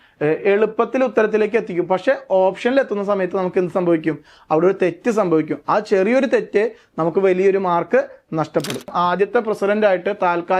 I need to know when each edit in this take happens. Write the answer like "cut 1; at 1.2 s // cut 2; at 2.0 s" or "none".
cut 1; at 8.9 s